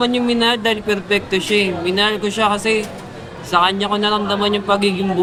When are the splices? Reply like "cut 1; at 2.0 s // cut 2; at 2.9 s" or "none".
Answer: none